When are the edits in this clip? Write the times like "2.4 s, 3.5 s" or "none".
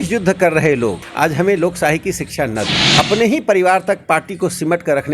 1.0 s, 2.8 s